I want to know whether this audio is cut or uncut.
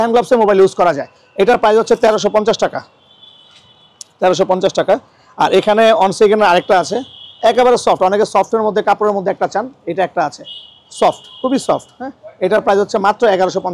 uncut